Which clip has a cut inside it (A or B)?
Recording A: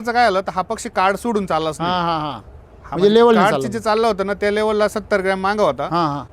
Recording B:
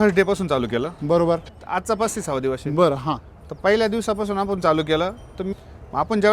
B